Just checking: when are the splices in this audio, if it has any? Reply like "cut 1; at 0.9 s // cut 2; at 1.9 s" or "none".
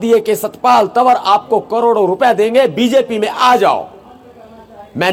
none